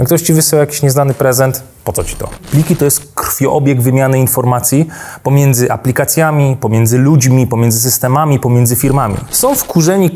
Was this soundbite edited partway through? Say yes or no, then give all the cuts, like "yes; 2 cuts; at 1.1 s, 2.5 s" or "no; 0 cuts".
yes; 2 cuts; at 2.4 s, 9.2 s